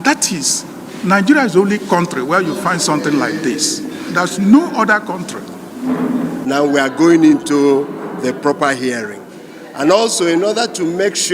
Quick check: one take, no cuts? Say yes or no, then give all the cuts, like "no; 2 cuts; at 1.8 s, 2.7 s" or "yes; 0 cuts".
no; 1 cut; at 6.4 s